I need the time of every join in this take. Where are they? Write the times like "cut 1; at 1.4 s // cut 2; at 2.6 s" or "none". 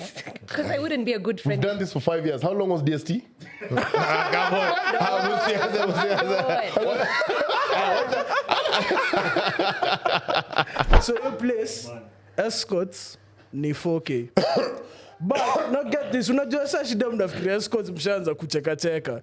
cut 1; at 10.9 s